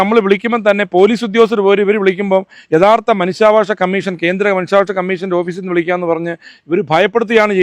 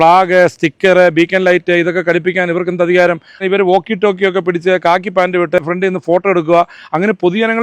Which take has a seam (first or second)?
second